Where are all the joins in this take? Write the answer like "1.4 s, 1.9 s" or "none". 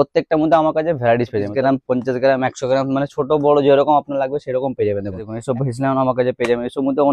1.5 s, 5.4 s